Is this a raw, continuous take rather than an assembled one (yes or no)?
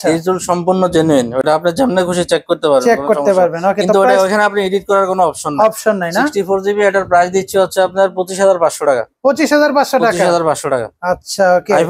yes